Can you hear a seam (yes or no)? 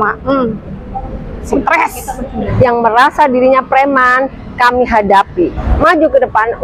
yes